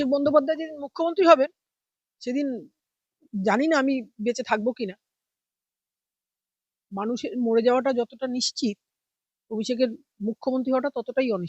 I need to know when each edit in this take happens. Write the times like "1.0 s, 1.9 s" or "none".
none